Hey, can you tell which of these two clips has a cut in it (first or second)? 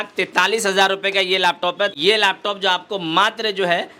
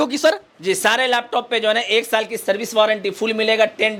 first